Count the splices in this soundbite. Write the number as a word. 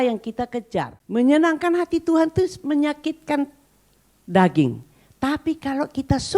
one